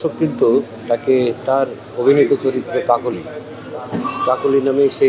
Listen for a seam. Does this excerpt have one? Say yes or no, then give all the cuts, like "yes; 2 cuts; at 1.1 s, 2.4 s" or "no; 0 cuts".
no; 0 cuts